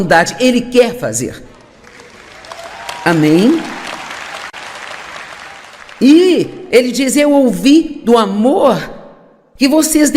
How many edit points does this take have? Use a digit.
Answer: 1